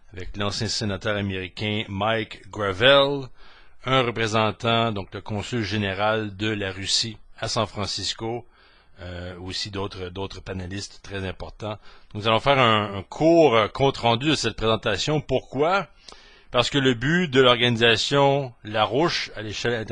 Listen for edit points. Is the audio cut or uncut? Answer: uncut